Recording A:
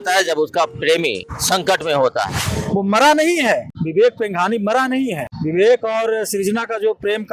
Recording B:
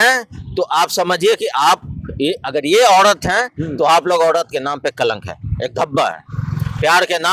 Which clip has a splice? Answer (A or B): A